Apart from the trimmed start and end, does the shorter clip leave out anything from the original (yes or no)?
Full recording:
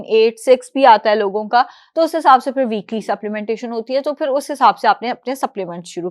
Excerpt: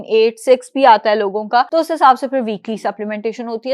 yes